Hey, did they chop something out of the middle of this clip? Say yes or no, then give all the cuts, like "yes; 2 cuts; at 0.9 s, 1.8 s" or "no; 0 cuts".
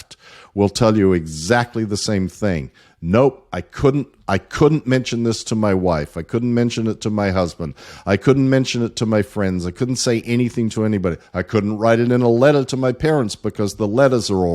no; 0 cuts